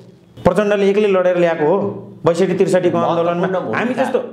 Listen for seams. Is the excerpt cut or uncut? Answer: uncut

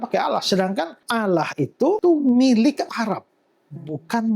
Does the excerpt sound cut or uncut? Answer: cut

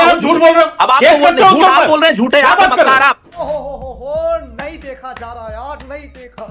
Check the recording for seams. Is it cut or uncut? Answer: uncut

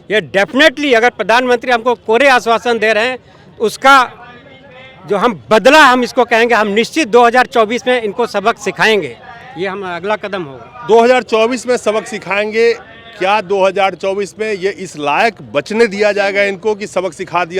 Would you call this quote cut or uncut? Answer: uncut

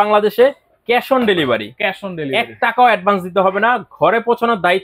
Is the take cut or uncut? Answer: uncut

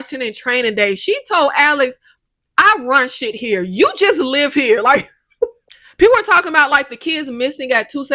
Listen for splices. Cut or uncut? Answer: cut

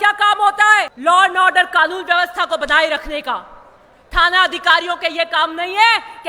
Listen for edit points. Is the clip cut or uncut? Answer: cut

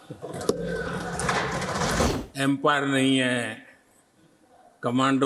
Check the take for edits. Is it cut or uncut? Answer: cut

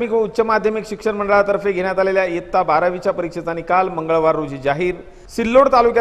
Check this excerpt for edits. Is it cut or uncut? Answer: uncut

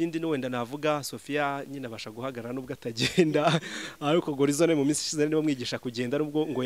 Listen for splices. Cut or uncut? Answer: uncut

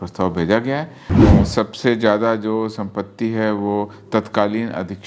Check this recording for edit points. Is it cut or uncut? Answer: cut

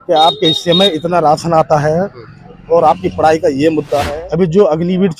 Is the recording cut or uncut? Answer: cut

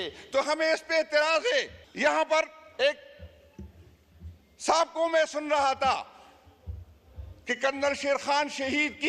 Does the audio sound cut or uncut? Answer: cut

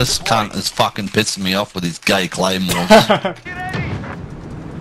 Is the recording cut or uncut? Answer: cut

